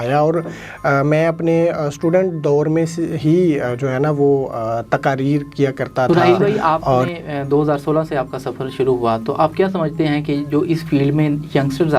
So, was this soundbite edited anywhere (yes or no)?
yes